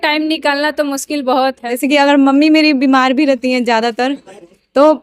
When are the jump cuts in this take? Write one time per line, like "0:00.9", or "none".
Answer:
0:01.7